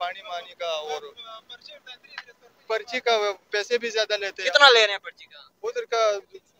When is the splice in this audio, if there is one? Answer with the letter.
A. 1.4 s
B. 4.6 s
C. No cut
C